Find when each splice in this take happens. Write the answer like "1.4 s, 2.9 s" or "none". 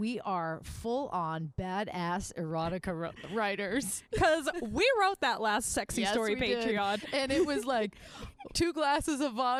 none